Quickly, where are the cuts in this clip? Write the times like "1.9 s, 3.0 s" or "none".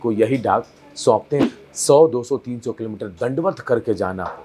1.5 s